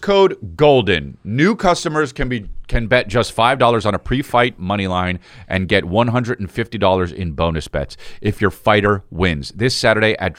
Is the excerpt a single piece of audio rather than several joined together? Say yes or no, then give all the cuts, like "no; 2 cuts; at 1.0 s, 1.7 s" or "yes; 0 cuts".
yes; 0 cuts